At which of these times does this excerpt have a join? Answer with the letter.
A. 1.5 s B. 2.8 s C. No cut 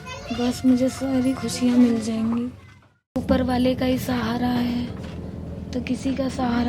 B